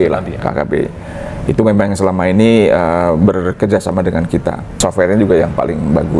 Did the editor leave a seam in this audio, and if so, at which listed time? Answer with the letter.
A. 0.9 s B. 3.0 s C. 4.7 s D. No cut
C